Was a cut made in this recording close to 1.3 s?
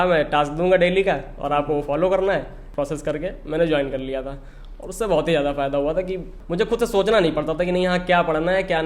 no; 2 cuts; at 2.6 s, 6.4 s

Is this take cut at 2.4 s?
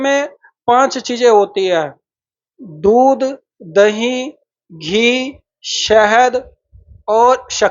no; 0 cuts

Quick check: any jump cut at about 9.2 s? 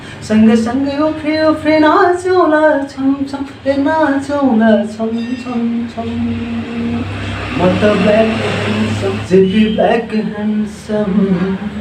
yes; 1 cut; at 9.2 s

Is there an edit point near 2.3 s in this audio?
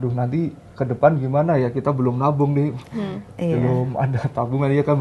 no; 0 cuts

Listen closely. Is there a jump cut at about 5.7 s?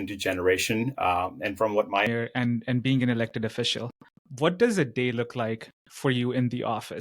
no; 1 cut; at 2.1 s

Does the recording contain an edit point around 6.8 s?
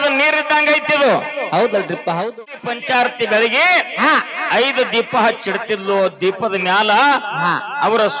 no; 1 cut; at 2.4 s

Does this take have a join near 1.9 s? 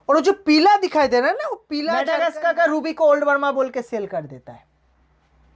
yes; 1 cut; at 1.9 s

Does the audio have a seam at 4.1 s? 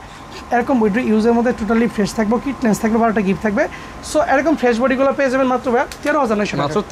no; 0 cuts

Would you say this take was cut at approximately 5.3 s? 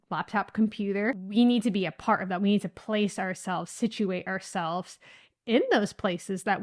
no; 1 cut; at 1.3 s

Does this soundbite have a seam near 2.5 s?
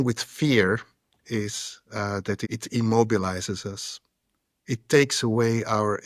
yes; 1 cut; at 2.5 s

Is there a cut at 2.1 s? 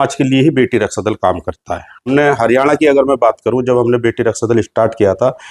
yes; 1 cut; at 2.1 s

